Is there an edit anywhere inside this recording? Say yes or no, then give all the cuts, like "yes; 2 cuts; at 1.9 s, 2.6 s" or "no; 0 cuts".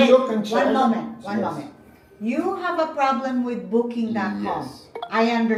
no; 0 cuts